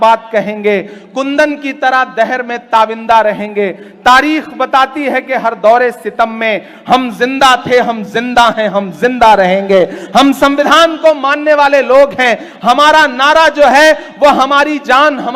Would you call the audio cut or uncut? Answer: uncut